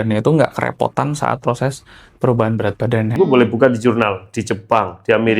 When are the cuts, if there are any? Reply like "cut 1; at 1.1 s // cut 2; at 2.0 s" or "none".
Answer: cut 1; at 3.1 s